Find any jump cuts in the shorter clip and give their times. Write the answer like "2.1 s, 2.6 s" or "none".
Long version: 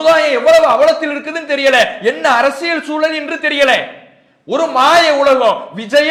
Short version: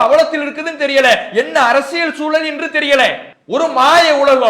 3.3 s